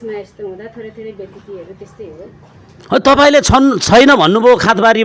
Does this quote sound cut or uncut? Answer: uncut